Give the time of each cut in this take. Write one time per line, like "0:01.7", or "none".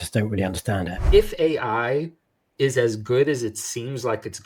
0:01.0